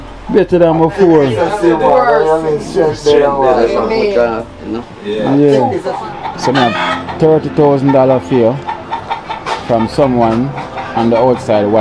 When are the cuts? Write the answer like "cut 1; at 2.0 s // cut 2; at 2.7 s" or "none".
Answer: cut 1; at 5.9 s